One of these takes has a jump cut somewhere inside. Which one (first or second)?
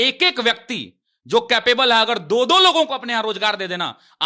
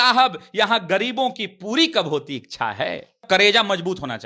second